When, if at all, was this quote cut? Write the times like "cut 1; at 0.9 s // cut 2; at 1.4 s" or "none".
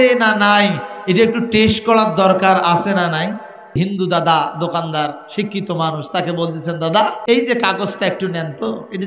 cut 1; at 3.8 s // cut 2; at 7.2 s